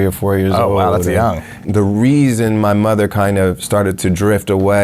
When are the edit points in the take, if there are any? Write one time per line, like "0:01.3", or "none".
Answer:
0:01.6